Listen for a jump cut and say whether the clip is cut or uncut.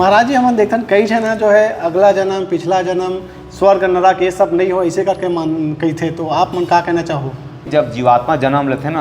cut